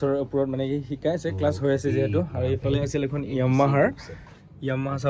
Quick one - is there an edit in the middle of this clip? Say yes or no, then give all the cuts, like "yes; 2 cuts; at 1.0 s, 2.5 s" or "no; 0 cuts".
no; 0 cuts